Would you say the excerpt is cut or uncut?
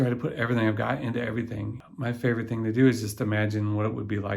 cut